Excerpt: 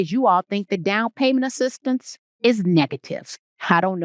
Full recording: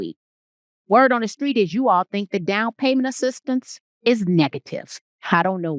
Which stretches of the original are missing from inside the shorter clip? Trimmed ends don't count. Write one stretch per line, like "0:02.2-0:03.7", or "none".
none

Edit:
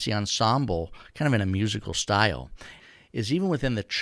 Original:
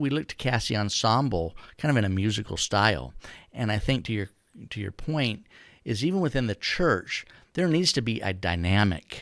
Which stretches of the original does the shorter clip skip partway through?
0:03.4-0:05.5

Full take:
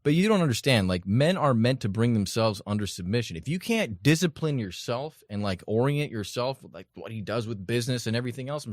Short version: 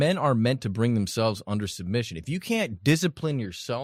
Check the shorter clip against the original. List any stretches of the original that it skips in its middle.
none

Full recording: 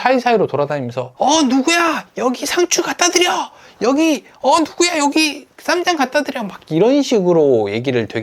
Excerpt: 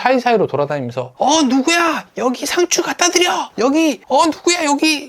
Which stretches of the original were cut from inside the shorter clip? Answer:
0:03.8-0:04.2

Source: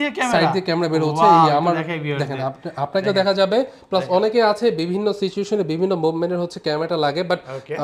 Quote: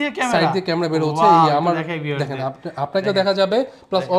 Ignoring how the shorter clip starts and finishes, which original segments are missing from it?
none

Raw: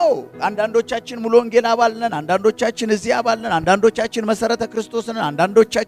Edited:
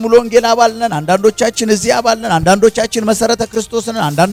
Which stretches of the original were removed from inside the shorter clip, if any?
none

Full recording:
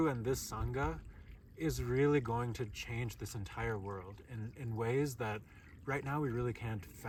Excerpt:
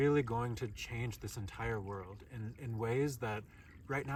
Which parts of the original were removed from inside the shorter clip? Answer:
none

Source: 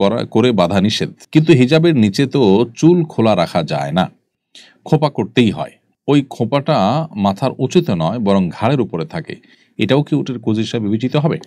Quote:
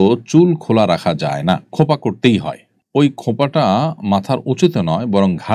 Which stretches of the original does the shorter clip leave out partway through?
0:04.2-0:04.8

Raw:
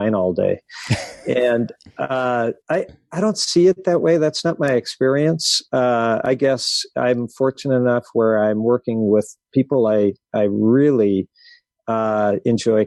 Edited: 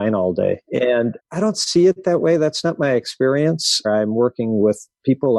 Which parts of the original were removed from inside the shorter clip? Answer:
0:01.1-0:02.9
0:05.7-0:08.4

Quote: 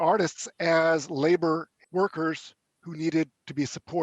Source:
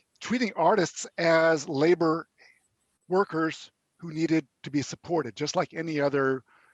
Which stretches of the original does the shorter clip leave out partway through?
0:02.3-0:02.9

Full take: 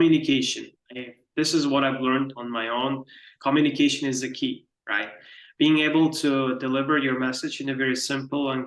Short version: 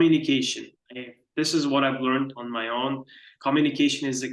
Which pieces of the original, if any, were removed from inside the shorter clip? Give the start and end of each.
none

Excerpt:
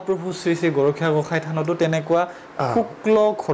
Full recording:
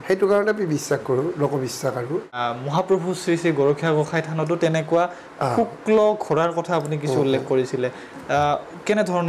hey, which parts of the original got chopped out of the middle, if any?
none

